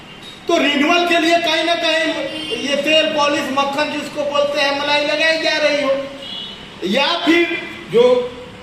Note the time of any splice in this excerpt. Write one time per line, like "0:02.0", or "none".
none